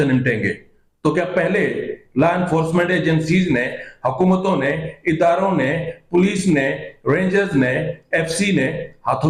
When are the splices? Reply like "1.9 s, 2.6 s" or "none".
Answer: none

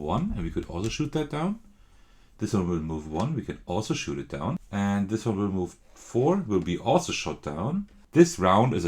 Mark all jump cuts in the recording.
4.6 s, 8.0 s

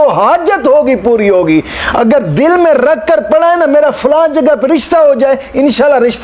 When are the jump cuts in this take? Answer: none

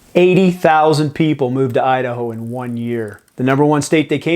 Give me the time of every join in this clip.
3.2 s

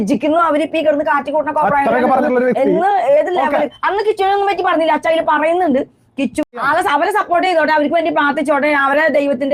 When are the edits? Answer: 6.4 s

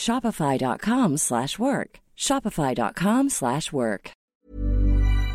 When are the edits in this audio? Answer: 4.2 s

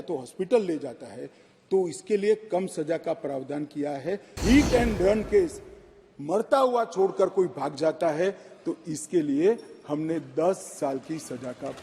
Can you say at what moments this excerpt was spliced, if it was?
4.4 s

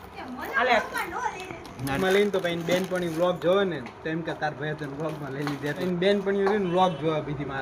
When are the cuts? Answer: 2.0 s, 5.8 s

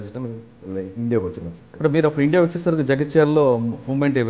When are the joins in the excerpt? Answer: 1.7 s

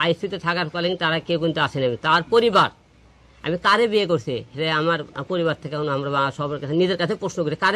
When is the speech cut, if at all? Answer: none

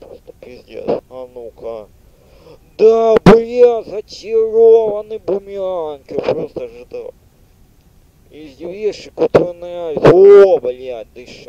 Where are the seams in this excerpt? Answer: 1.1 s

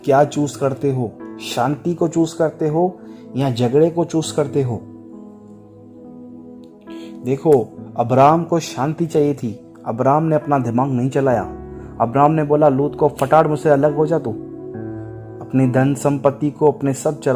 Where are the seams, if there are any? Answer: 5.1 s, 6.6 s

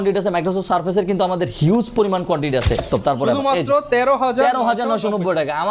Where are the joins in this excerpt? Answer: 2.9 s

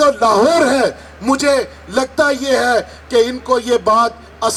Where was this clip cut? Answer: none

